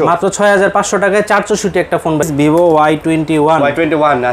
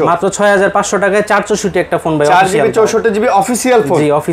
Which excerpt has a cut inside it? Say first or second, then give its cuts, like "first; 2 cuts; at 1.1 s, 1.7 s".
first; 1 cut; at 2.2 s